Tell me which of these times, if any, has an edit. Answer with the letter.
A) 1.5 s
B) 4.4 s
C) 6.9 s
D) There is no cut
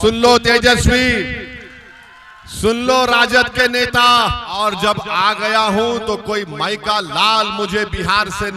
B